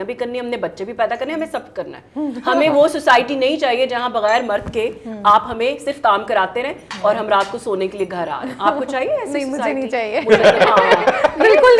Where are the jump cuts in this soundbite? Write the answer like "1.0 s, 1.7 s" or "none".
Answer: none